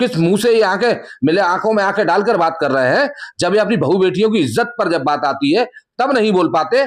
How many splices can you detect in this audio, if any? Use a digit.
0